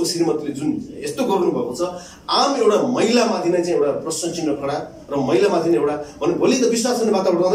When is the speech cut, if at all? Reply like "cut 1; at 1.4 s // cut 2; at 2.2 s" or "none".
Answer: none